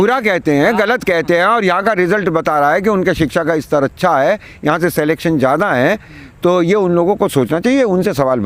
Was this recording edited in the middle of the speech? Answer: no; 0 cuts

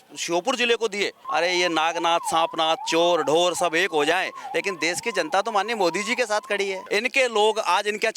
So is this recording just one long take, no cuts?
no; 2 cuts; at 1.2 s, 6.8 s

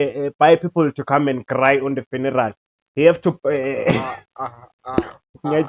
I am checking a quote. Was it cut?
no; 0 cuts

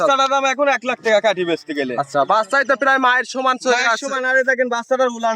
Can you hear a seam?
no; 0 cuts

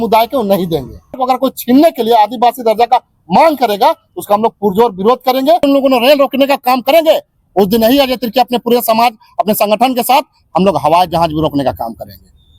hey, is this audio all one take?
no; 2 cuts; at 1.2 s, 5.6 s

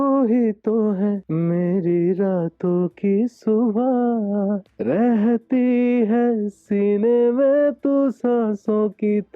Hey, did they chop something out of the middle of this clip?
yes; 2 cuts; at 1.2 s, 4.7 s

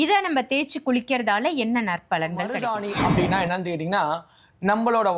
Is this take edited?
yes; 1 cut; at 2.7 s

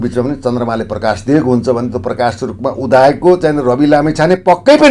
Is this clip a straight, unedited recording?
yes; 0 cuts

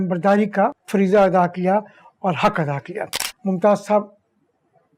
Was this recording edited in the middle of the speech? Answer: yes; 1 cut; at 3.1 s

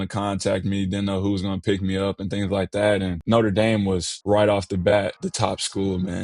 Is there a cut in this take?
yes; 3 cuts; at 3.2 s, 4.1 s, 5.2 s

